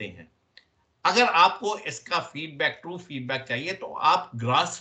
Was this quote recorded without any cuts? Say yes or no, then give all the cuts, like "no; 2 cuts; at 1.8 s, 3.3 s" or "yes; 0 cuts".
yes; 0 cuts